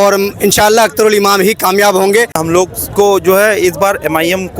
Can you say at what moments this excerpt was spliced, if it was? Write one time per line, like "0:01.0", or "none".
0:02.4